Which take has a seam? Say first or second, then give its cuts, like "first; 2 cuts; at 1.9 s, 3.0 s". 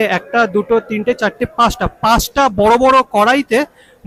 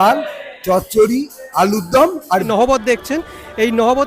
second; 1 cut; at 2.5 s